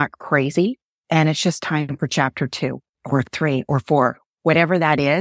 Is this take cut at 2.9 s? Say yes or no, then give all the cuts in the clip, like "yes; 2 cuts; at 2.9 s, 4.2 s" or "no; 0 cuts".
yes; 2 cuts; at 0.9 s, 2.9 s